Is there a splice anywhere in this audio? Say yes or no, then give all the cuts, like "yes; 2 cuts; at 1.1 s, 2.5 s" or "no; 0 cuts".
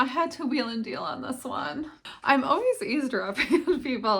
yes; 1 cut; at 2.0 s